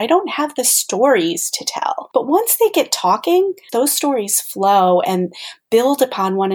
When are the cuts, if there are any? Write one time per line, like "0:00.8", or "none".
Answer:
0:02.0
0:03.6